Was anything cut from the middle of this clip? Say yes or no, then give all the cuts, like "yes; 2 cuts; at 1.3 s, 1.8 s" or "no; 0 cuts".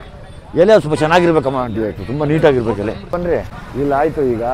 yes; 1 cut; at 3.1 s